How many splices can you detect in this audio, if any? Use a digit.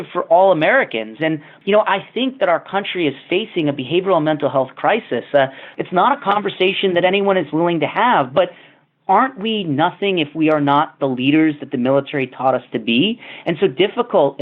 2